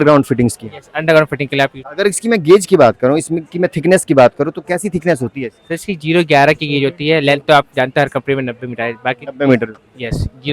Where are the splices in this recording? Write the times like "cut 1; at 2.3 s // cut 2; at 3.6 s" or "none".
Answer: cut 1; at 1.8 s

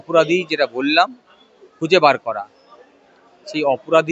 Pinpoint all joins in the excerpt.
none

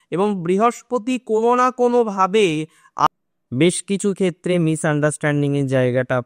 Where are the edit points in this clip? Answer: cut 1; at 3.1 s

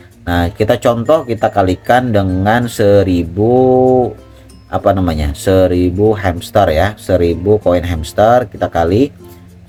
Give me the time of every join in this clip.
none

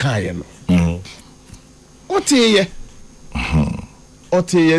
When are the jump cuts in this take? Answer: none

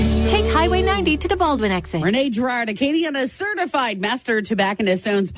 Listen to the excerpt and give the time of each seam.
cut 1; at 1.9 s

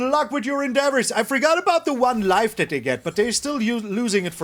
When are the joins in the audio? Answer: none

